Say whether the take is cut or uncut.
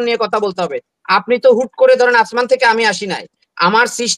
uncut